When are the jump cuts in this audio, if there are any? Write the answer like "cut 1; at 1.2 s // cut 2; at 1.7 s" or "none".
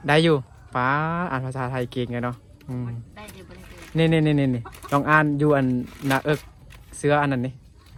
none